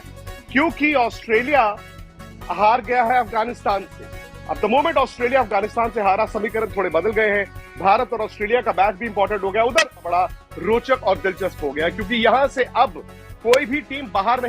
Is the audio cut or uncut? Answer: cut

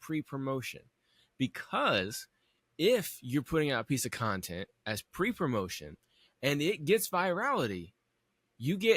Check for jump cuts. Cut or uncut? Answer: uncut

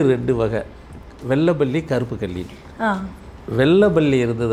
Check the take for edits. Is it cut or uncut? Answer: uncut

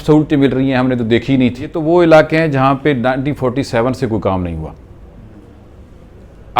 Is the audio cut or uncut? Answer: cut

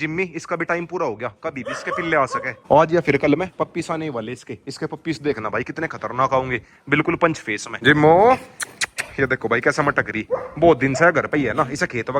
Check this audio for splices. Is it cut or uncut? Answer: uncut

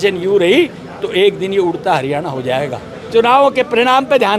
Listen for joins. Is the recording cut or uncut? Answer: cut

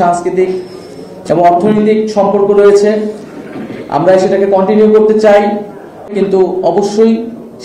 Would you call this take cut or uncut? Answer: cut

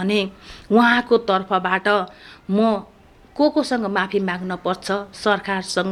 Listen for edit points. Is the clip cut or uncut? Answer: uncut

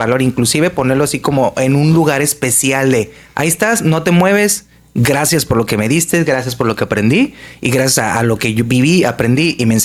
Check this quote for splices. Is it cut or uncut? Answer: uncut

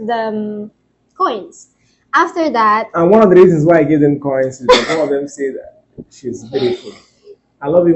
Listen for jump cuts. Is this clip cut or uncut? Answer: uncut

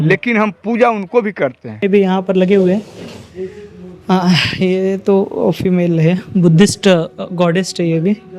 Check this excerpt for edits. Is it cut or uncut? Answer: cut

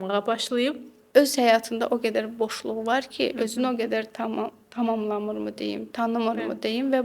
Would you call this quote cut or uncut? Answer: cut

